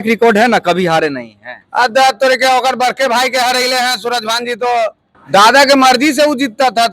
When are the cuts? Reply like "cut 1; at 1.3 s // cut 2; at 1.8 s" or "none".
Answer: cut 1; at 5.1 s